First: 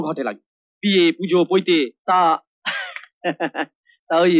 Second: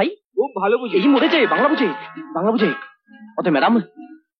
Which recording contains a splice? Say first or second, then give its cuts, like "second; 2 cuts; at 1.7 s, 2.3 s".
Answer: first; 1 cut; at 2.0 s